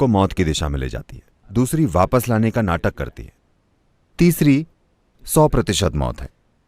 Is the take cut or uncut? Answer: uncut